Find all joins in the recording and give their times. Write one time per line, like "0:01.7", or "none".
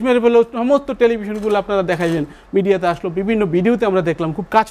none

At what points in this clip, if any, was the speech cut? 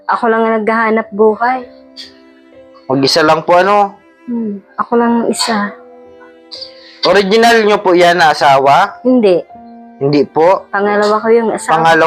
none

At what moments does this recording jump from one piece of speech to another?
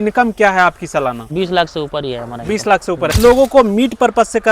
0:01.2
0:03.1

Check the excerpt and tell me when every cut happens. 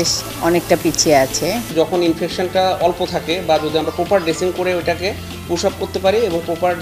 0:01.7

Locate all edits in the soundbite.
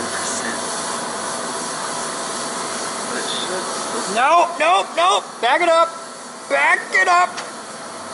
none

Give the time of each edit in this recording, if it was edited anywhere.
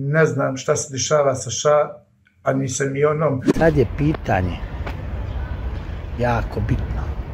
0:03.5

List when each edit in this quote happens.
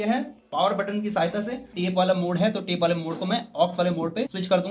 0:01.7

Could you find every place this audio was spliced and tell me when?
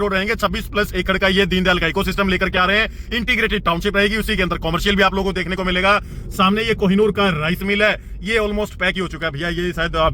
none

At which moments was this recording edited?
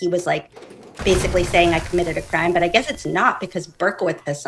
none

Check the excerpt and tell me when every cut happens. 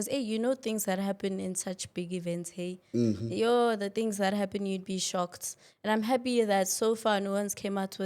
none

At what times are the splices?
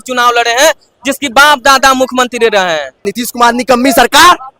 0:03.1

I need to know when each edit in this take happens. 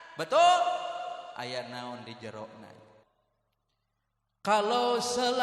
0:03.0

